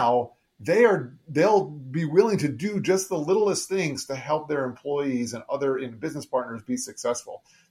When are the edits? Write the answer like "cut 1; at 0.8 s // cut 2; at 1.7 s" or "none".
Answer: none